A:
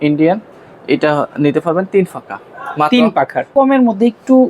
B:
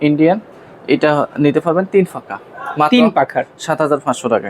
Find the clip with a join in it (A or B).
A